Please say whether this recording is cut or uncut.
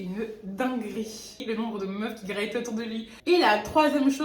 cut